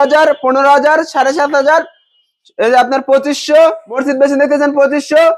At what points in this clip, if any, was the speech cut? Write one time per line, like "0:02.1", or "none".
0:03.9